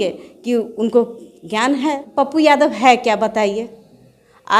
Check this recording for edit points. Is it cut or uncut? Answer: cut